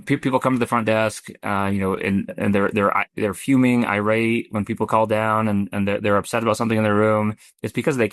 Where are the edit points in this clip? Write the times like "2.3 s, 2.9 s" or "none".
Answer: none